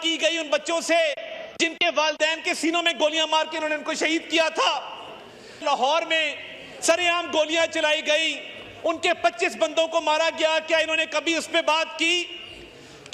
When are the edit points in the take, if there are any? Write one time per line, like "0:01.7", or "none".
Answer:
none